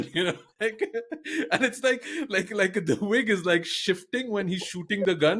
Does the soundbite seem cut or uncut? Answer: uncut